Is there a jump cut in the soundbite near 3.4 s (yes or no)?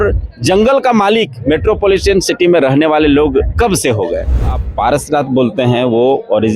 no